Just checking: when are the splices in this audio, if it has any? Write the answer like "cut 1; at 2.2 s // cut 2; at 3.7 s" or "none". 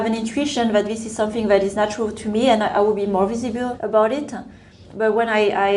cut 1; at 1.7 s // cut 2; at 3.8 s